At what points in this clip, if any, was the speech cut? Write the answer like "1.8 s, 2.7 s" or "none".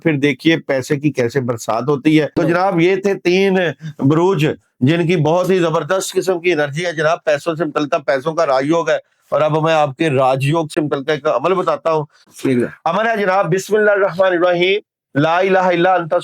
2.3 s